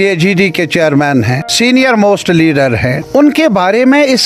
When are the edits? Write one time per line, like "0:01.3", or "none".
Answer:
0:01.4
0:03.0